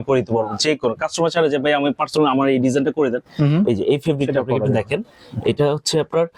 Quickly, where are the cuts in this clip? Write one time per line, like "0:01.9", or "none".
none

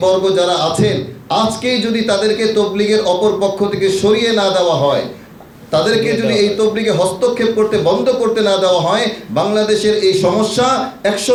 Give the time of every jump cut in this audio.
none

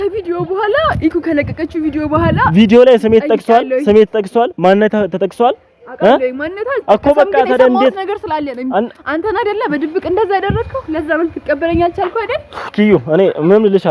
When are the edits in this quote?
none

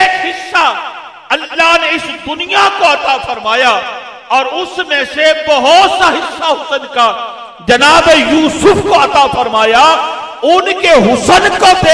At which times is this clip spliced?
none

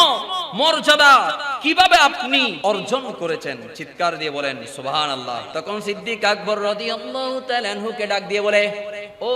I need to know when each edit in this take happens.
0:02.5
0:05.4

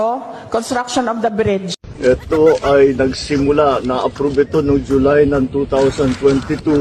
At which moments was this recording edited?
0:01.8

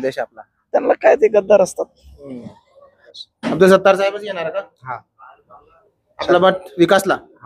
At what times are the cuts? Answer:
0:03.1

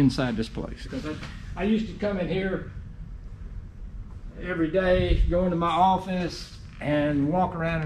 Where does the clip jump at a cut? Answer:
0:00.9

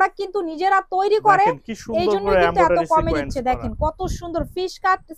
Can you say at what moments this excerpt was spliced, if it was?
none

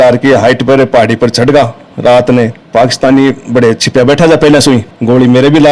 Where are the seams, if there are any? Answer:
0:02.6
0:04.8

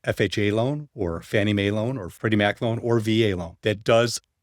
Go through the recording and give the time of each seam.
0:02.1
0:03.5

